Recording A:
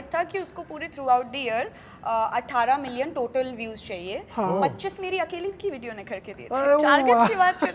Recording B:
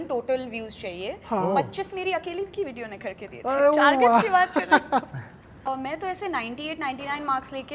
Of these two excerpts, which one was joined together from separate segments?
B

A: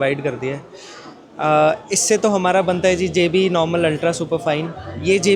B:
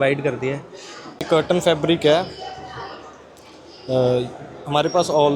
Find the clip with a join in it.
B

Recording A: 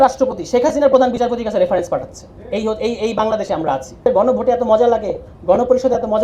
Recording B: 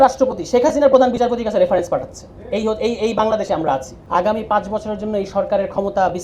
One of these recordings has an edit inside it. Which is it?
A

